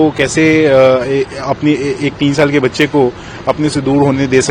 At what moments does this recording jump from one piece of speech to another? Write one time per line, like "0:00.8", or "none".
none